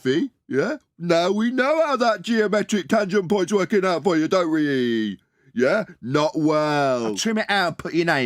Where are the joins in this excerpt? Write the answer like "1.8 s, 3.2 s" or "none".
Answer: 7.2 s